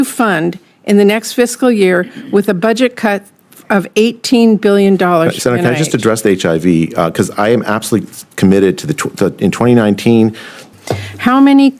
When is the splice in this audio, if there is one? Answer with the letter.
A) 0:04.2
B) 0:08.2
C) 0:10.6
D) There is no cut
C